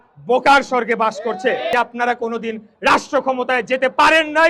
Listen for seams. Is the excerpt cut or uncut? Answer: cut